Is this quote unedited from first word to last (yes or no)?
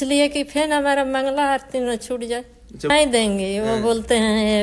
no